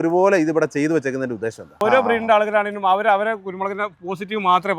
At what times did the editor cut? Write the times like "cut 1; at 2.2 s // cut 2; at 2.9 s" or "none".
cut 1; at 1.8 s

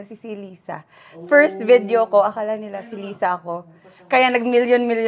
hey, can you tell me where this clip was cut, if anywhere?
none

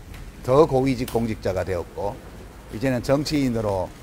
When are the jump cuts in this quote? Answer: none

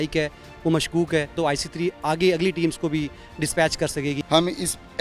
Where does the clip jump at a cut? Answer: cut 1; at 1.3 s // cut 2; at 4.2 s

